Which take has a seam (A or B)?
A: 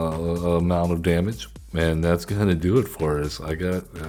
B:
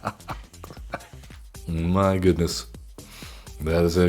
B